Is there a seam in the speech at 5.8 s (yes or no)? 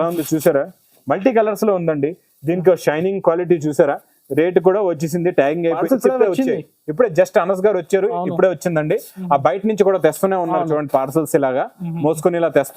yes